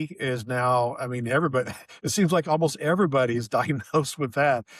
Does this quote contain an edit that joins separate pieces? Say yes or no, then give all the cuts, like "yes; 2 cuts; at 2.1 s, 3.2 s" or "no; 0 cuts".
no; 0 cuts